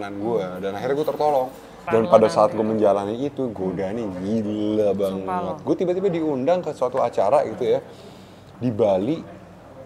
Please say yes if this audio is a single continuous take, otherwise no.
no